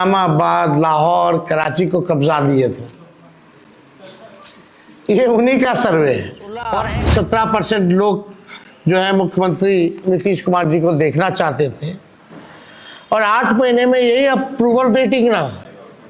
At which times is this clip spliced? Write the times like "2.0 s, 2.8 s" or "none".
6.8 s